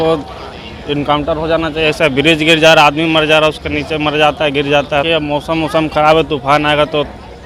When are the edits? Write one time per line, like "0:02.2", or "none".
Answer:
0:05.1